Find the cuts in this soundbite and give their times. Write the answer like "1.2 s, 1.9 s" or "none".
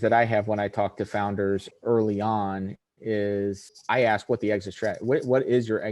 1.7 s, 3.7 s